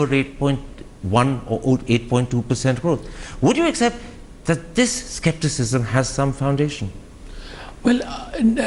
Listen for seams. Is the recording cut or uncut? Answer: cut